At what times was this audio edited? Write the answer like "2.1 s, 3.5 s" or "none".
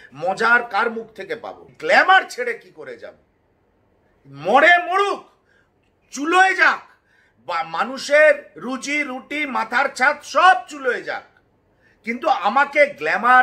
1.7 s